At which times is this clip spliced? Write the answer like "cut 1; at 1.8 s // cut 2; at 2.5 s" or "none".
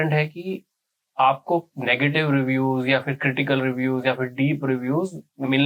none